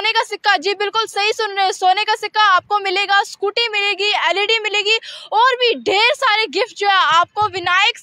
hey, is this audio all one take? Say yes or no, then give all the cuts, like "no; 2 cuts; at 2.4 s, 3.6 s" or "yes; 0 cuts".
yes; 0 cuts